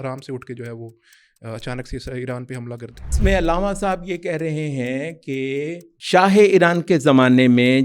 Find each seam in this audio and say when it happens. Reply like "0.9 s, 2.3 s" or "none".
3.1 s, 5.9 s